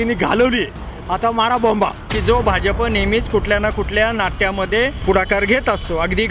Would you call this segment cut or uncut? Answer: cut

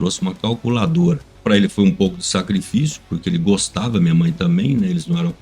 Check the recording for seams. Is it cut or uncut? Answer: cut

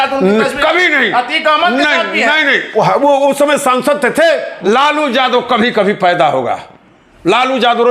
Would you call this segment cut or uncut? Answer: cut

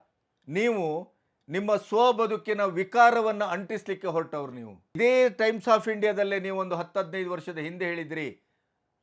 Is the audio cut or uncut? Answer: cut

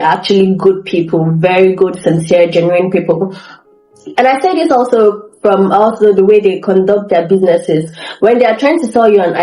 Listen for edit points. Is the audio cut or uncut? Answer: uncut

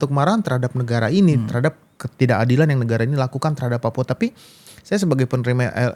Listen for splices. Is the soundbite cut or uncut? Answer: uncut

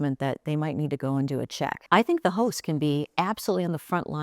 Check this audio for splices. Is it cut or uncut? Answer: cut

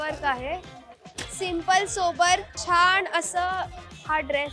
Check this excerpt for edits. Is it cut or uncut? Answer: cut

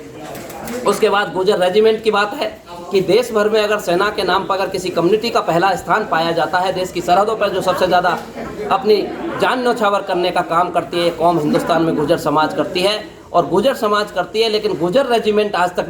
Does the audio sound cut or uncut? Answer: uncut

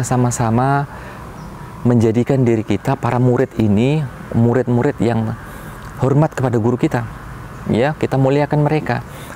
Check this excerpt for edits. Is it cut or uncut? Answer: uncut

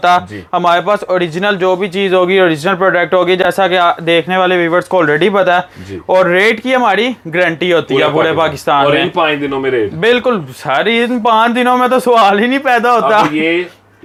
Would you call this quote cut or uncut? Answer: uncut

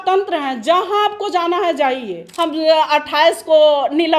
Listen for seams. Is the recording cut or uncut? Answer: cut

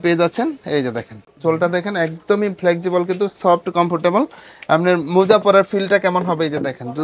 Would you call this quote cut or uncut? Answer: uncut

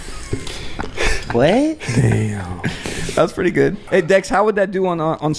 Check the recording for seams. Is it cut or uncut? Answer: cut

